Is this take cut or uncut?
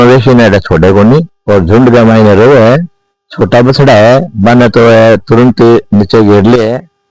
cut